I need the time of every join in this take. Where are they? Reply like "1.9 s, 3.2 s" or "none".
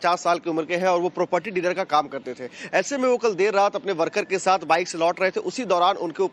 1.1 s